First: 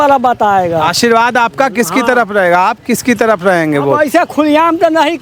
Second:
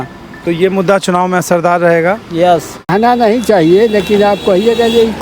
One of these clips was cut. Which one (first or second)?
second